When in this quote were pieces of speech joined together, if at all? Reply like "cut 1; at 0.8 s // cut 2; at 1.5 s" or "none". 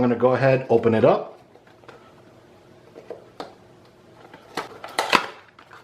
cut 1; at 4.7 s

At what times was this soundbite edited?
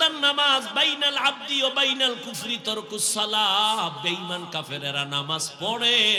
none

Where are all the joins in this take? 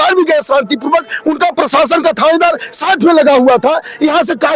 none

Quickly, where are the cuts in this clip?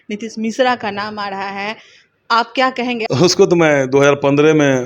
cut 1; at 3.1 s

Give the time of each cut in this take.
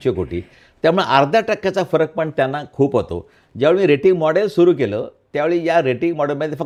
none

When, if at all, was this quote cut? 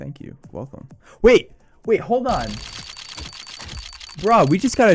cut 1; at 2.6 s // cut 2; at 3.9 s

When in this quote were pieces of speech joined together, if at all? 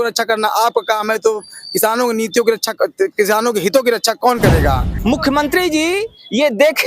cut 1; at 4.9 s

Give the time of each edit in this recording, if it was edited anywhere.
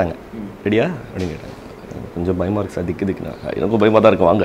none

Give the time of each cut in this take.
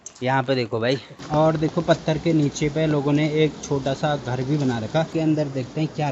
cut 1; at 1.2 s // cut 2; at 5.1 s

